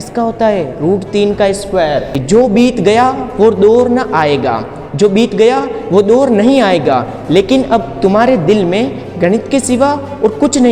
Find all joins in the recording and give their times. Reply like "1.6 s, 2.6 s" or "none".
2.1 s